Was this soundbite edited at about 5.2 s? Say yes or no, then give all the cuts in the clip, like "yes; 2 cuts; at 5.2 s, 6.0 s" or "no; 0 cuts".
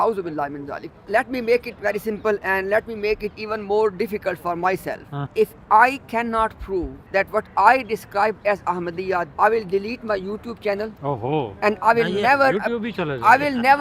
yes; 4 cuts; at 1.0 s, 5.2 s, 7.0 s, 9.3 s